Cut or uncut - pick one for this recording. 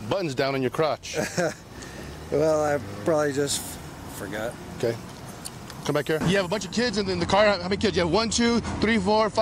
cut